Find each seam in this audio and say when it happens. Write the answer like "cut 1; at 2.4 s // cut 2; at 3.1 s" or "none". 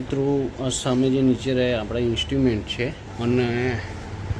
cut 1; at 3.1 s